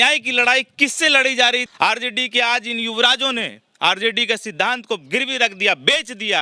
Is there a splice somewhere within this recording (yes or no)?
yes